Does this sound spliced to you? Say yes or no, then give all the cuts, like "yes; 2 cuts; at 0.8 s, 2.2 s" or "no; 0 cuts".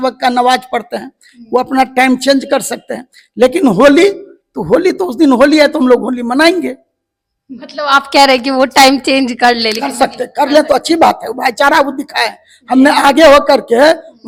no; 0 cuts